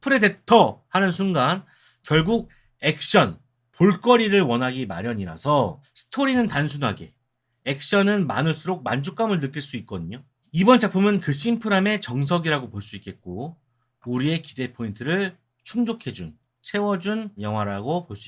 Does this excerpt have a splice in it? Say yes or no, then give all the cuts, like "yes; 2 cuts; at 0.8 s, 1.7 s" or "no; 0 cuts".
yes; 1 cut; at 17.4 s